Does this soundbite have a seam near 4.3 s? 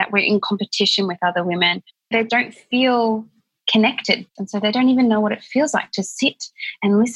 yes; 2 cuts; at 2.2 s, 4.3 s

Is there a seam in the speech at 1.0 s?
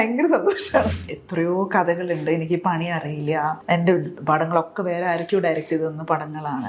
yes; 2 cuts; at 1.0 s, 3.6 s

